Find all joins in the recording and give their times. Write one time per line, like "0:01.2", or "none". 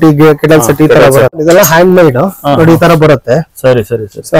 0:01.4